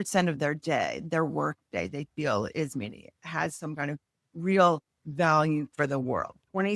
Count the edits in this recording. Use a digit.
0